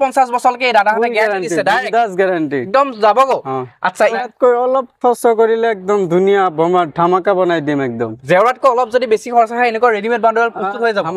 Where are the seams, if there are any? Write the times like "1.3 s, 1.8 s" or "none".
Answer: 4.2 s